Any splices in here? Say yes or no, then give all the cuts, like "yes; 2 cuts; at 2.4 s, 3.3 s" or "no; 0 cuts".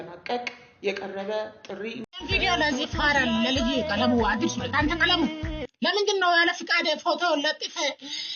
yes; 1 cut; at 2.0 s